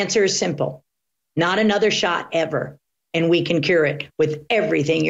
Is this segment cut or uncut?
uncut